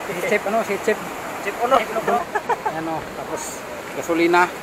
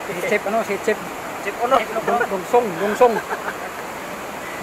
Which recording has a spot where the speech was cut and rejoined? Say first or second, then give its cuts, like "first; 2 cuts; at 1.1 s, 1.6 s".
first; 1 cut; at 2.2 s